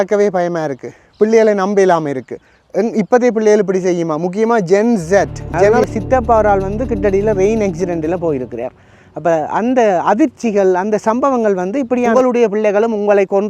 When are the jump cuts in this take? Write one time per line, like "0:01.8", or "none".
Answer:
0:05.7
0:12.1